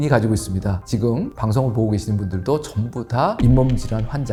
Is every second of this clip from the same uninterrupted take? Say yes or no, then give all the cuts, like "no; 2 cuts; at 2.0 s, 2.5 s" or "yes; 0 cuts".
yes; 0 cuts